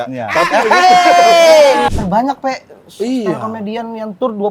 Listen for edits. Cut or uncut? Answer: cut